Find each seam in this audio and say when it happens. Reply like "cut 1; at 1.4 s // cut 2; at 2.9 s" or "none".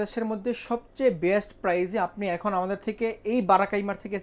none